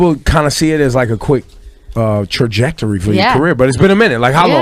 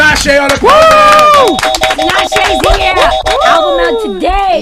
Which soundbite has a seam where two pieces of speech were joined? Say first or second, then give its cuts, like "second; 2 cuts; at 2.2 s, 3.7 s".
first; 1 cut; at 2.4 s